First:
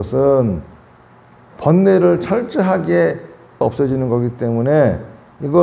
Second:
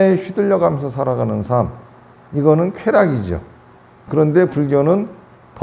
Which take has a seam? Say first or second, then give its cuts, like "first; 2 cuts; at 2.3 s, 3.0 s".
first; 1 cut; at 3.6 s